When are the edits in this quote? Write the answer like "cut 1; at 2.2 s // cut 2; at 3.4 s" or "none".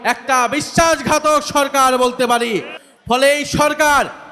cut 1; at 2.7 s